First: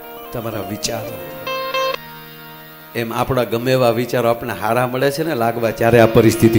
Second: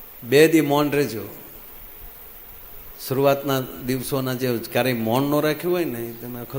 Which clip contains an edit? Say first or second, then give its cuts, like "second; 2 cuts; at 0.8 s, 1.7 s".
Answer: first; 1 cut; at 1.9 s